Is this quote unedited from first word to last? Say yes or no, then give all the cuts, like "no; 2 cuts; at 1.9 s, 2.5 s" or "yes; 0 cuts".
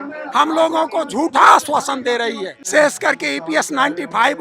no; 1 cut; at 2.6 s